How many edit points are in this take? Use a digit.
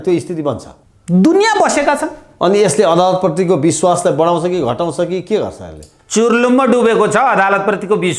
1